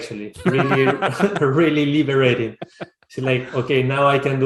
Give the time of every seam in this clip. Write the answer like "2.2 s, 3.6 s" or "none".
none